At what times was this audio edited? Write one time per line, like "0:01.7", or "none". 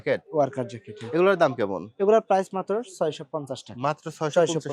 none